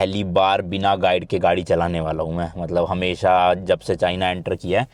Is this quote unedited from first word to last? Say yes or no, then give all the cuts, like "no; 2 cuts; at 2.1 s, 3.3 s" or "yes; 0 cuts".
yes; 0 cuts